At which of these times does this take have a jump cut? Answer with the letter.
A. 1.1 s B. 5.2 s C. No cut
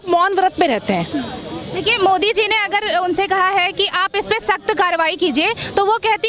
C